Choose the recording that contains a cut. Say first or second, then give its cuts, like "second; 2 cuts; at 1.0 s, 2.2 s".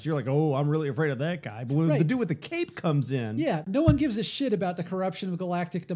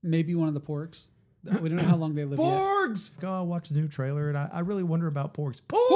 second; 1 cut; at 3.2 s